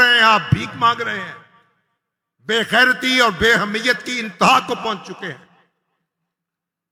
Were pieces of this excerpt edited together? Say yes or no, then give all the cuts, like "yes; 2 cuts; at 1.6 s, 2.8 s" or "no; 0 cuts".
no; 0 cuts